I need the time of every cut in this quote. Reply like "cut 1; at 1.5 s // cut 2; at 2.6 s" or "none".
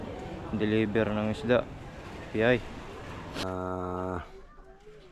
cut 1; at 3.4 s